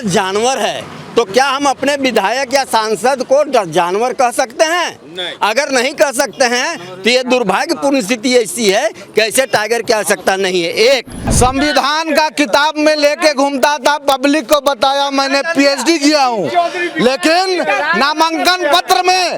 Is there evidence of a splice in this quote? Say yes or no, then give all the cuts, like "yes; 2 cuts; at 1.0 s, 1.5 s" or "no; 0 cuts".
yes; 1 cut; at 11.2 s